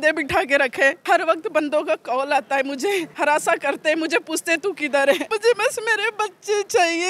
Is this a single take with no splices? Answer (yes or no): no